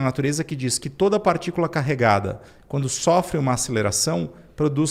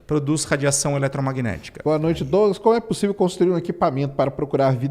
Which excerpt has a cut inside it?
second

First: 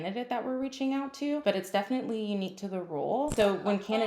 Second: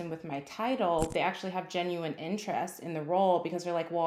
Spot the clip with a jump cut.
first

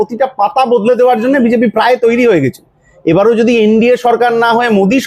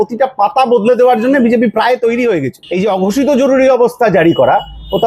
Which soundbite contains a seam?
second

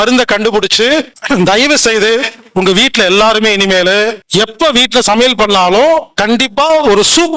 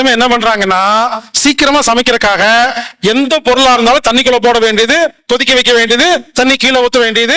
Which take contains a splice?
first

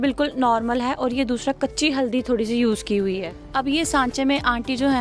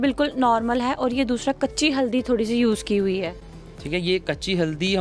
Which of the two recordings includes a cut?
first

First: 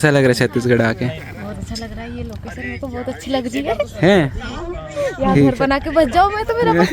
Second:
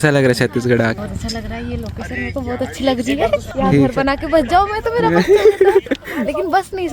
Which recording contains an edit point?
second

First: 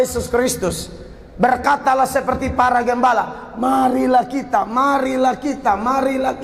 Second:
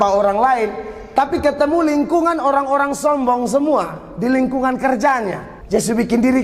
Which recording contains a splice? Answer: second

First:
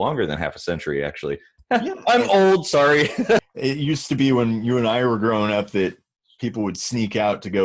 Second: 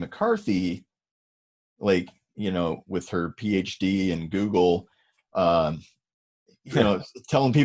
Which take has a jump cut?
first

